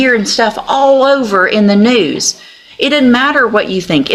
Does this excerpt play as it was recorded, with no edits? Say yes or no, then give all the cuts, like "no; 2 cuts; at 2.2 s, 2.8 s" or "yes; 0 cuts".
yes; 0 cuts